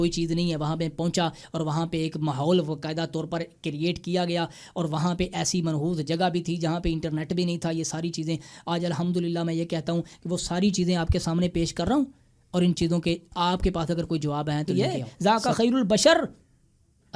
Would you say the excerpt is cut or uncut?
cut